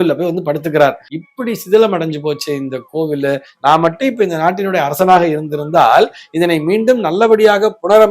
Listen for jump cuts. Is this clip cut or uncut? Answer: cut